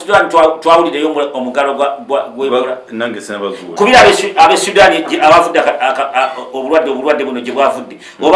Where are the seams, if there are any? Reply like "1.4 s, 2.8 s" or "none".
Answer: none